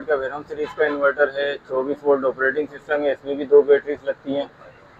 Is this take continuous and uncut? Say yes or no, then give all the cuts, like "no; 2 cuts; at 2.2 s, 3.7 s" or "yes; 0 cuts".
yes; 0 cuts